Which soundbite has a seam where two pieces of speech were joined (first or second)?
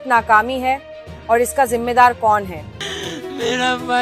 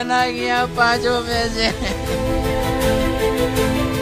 first